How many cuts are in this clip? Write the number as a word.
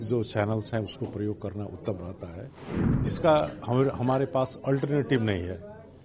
one